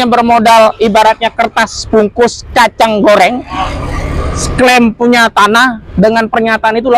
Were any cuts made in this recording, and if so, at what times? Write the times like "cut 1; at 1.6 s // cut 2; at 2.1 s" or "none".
none

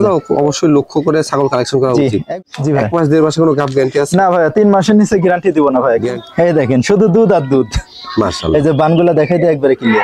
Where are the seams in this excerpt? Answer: cut 1; at 2.4 s // cut 2; at 6.1 s

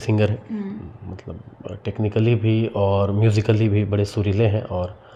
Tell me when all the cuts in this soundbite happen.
none

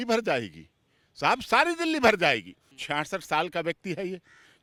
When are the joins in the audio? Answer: none

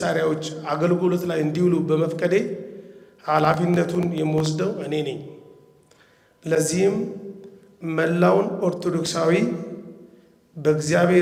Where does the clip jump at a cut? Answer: none

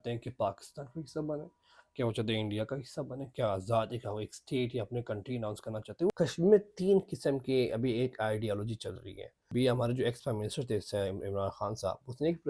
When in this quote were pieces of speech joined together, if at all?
cut 1; at 6.1 s // cut 2; at 9.5 s

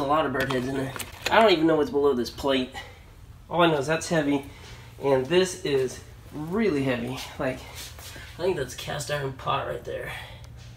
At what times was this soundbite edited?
none

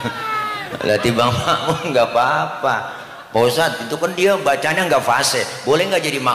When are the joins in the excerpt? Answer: none

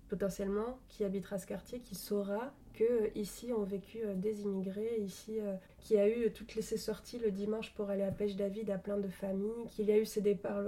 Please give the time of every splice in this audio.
cut 1; at 2.6 s // cut 2; at 5.7 s // cut 3; at 9.7 s

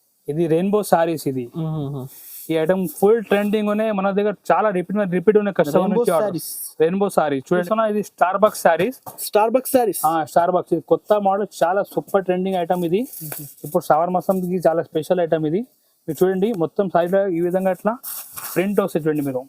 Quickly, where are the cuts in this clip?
cut 1; at 7.4 s

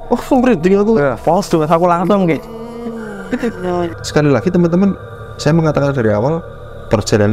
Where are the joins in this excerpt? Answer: cut 1; at 4.0 s

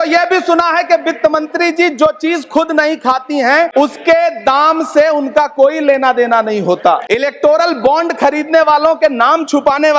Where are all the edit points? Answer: cut 1; at 3.7 s // cut 2; at 7.0 s

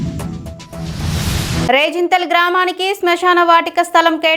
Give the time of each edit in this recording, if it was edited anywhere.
none

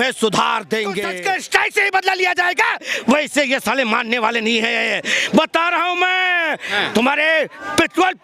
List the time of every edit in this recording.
cut 1; at 1.1 s

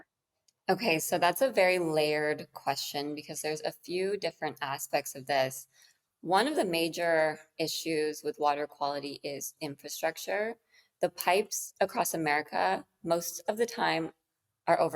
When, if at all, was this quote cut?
none

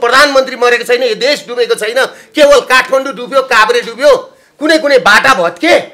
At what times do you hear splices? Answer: none

